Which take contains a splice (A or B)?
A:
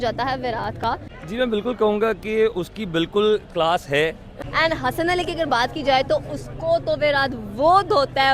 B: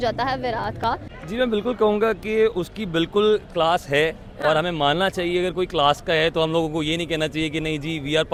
A